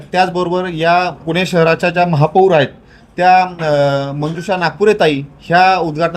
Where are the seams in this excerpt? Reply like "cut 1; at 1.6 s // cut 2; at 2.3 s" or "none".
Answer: none